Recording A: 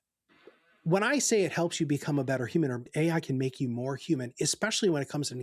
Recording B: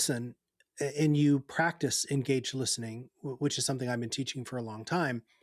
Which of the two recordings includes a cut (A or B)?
A